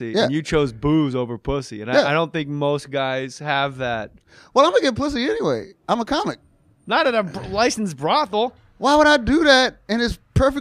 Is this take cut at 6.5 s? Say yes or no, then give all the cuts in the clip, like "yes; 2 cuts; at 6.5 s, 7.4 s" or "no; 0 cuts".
yes; 1 cut; at 6.5 s